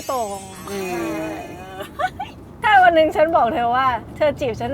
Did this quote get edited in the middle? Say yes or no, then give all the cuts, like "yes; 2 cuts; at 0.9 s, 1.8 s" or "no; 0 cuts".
no; 0 cuts